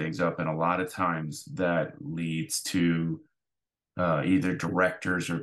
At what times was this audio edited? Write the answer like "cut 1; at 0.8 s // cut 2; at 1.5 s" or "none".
none